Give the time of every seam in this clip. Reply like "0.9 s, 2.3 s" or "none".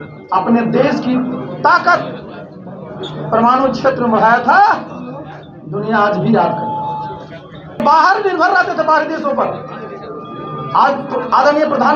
7.8 s